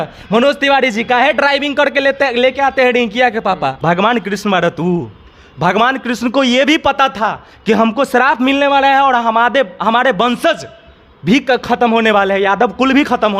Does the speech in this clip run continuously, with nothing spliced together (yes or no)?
no